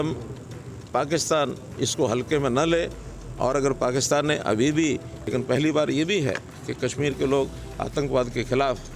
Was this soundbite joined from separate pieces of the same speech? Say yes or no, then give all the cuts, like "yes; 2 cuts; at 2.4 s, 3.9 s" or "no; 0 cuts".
yes; 1 cut; at 5.1 s